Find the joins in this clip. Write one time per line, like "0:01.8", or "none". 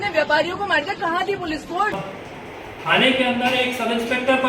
0:02.0